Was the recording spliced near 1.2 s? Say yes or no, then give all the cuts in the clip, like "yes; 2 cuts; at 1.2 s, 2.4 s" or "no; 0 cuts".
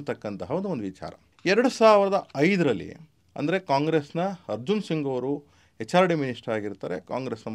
no; 0 cuts